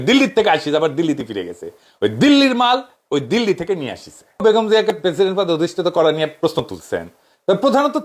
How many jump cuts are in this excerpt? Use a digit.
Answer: 1